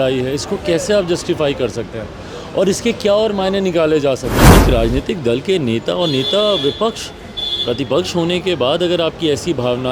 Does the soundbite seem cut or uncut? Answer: cut